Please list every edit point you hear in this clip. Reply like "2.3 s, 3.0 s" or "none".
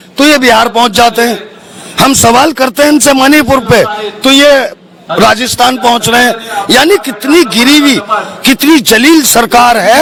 none